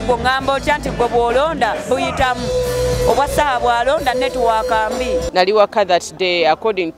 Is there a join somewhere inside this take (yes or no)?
yes